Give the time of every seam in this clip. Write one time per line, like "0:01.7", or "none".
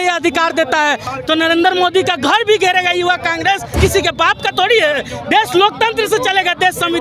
0:01.1
0:03.7